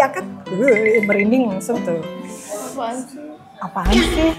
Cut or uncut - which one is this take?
uncut